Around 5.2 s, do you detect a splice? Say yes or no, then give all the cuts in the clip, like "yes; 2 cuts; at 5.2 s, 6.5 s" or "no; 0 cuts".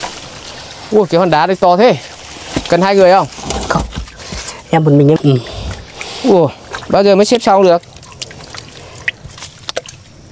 yes; 1 cut; at 5.2 s